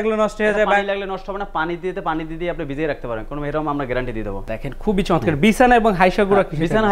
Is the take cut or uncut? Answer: cut